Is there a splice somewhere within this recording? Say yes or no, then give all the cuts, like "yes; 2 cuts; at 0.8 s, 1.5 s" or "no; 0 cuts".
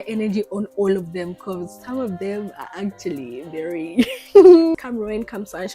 yes; 1 cut; at 4.8 s